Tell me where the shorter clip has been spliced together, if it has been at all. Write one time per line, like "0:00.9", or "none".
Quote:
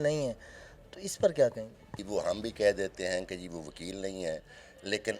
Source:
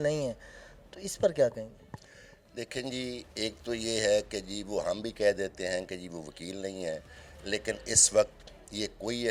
0:02.0